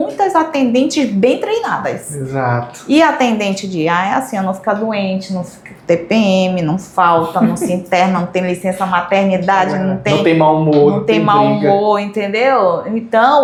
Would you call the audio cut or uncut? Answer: uncut